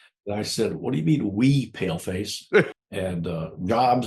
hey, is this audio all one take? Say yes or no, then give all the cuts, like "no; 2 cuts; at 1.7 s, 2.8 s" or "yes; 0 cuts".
no; 1 cut; at 2.7 s